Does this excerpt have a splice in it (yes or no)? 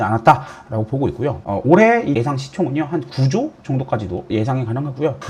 yes